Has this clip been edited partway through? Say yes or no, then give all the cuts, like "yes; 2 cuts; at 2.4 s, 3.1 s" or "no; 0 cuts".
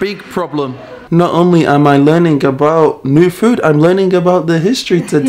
yes; 1 cut; at 1.0 s